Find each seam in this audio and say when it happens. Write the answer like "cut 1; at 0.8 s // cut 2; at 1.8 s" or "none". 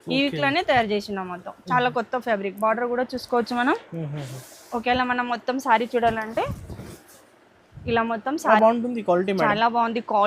cut 1; at 8.6 s